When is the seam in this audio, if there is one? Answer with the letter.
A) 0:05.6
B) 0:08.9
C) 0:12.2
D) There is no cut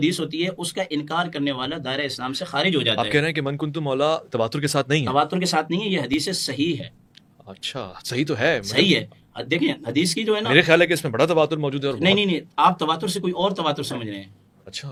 D